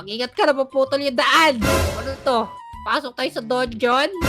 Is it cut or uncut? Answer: cut